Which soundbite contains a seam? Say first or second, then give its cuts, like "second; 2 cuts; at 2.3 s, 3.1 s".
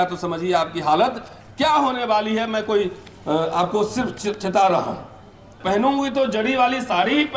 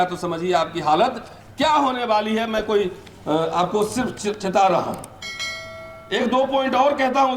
first; 1 cut; at 5.5 s